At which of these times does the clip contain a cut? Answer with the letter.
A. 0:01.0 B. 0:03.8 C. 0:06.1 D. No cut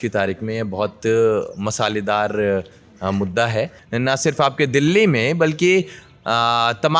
B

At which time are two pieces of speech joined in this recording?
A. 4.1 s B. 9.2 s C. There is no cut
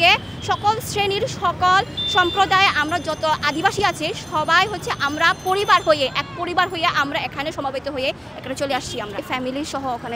B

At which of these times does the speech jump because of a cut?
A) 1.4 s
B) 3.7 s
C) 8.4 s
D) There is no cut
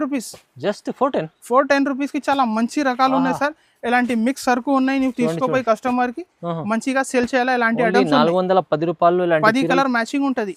D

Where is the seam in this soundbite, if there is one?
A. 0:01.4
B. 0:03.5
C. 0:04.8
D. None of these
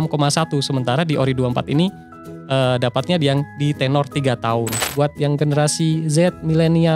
C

